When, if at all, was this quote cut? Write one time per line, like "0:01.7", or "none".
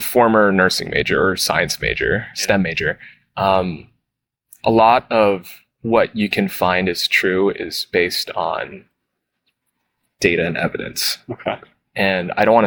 none